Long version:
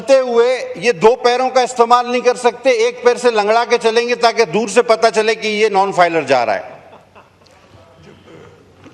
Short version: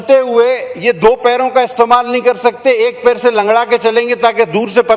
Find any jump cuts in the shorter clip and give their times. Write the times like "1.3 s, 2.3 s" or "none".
none